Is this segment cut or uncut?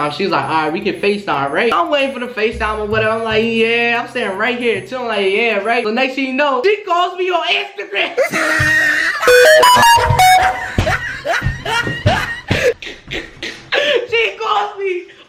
uncut